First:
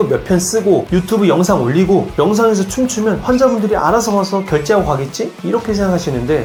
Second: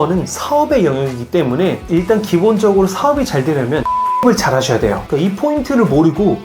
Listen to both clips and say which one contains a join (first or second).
second